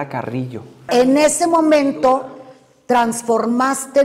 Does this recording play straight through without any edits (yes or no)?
no